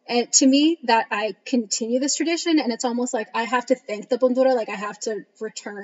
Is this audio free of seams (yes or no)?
no